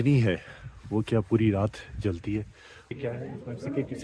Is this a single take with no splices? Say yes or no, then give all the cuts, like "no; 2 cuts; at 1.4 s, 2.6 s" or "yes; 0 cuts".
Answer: no; 1 cut; at 3.0 s